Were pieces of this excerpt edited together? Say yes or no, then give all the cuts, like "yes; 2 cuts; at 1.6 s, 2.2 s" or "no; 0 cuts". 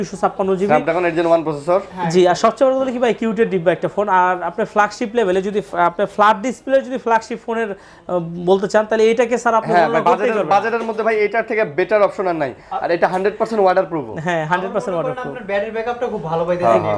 no; 0 cuts